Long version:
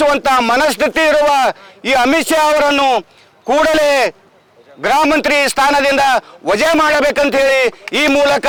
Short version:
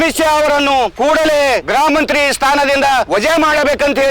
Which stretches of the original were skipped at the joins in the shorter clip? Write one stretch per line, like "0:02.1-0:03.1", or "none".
0:03.0-0:03.4
0:04.1-0:04.8
0:06.2-0:06.4